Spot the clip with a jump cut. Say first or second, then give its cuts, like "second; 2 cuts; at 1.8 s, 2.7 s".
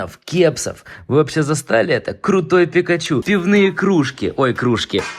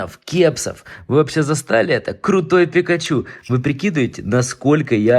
first; 1 cut; at 3.2 s